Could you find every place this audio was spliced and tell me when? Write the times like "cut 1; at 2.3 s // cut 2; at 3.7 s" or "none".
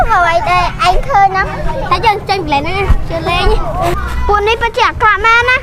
cut 1; at 3.9 s